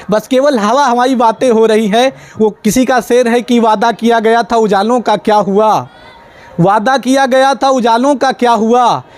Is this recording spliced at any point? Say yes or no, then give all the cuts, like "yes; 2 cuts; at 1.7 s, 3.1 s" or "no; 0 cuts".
no; 0 cuts